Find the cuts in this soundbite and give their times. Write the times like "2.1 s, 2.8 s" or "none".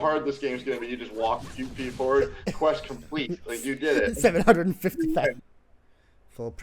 5.5 s